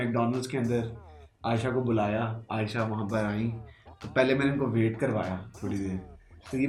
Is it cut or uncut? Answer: uncut